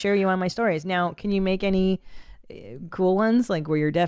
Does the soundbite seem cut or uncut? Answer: uncut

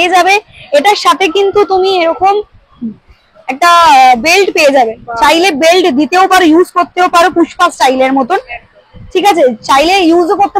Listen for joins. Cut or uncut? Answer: uncut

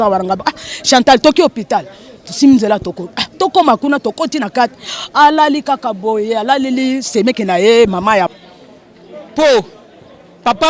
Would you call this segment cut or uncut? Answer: cut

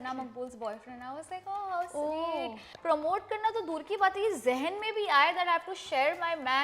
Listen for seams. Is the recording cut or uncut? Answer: cut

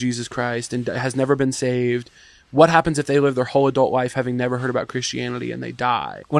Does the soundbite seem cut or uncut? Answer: uncut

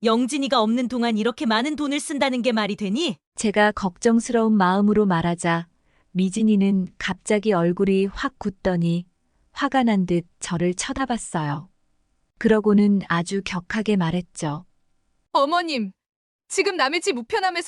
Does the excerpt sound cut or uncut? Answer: uncut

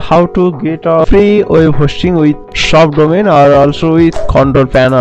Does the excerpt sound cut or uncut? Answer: cut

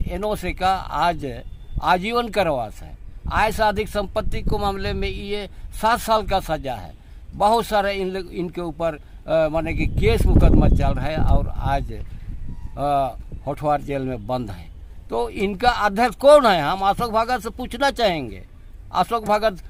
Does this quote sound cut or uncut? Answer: uncut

